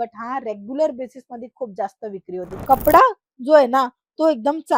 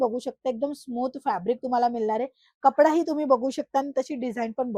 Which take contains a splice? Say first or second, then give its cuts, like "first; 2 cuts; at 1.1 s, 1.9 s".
first; 1 cut; at 2.5 s